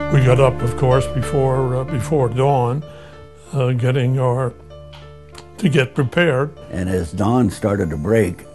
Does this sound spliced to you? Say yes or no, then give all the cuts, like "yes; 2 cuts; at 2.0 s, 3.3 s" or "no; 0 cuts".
yes; 1 cut; at 6.7 s